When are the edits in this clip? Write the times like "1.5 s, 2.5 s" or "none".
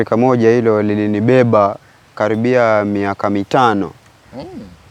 none

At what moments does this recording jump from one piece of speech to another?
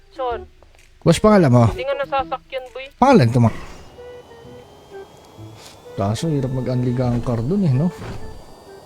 3.4 s

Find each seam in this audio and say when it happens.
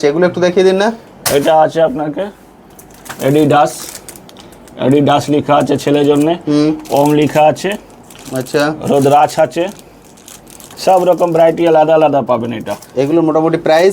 none

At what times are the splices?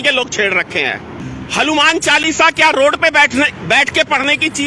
1.2 s

